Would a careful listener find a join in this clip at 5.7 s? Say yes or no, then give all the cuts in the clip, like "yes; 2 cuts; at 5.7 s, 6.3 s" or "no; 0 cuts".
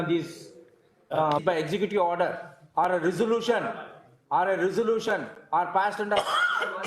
no; 1 cut; at 1.4 s